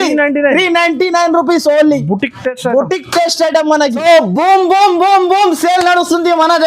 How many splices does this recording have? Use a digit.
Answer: 1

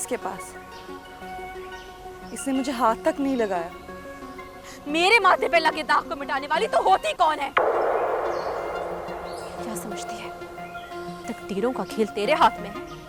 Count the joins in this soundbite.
0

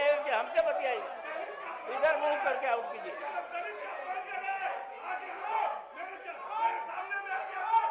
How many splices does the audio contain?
0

